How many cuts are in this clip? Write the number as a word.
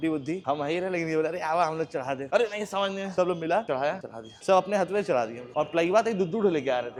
zero